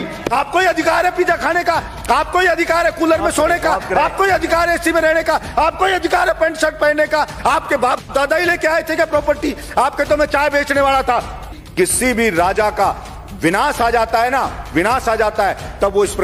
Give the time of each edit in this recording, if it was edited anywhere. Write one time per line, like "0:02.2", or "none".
0:11.6